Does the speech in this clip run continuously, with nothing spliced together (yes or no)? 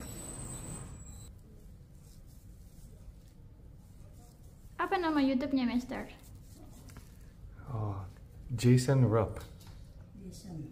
no